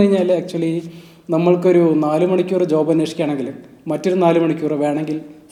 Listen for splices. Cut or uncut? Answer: uncut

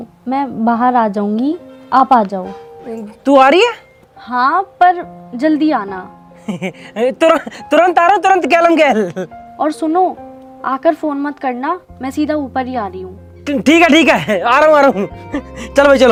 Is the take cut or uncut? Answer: uncut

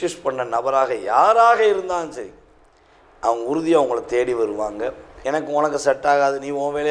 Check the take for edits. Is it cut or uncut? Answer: cut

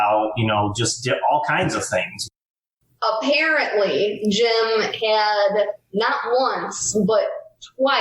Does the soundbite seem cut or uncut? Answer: cut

